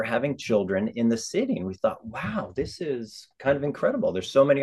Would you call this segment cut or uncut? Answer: uncut